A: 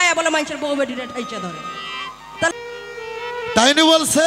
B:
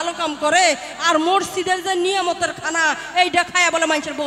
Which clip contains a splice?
A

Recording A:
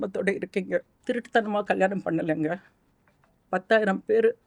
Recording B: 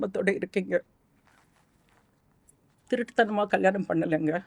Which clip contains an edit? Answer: A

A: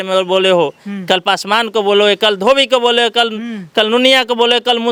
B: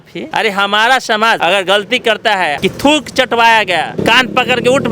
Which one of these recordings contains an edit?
B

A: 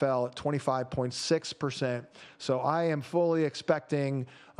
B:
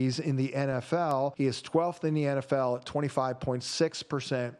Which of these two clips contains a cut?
B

